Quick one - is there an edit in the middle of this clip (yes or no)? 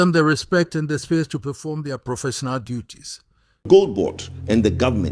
yes